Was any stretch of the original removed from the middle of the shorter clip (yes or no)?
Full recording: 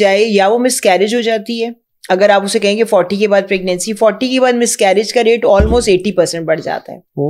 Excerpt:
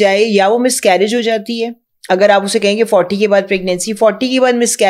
no